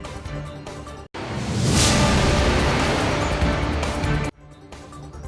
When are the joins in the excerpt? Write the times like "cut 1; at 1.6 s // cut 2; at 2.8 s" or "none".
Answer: cut 1; at 1.0 s